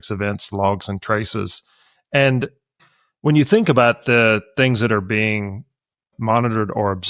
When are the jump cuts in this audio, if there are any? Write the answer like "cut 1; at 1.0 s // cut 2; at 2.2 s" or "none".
none